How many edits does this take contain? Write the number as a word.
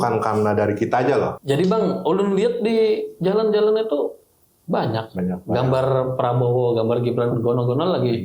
one